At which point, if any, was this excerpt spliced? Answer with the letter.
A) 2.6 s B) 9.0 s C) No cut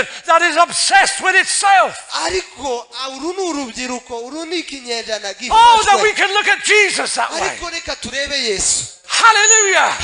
C